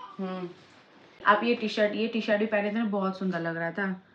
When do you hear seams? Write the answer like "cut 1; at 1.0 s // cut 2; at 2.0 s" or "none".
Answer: cut 1; at 1.2 s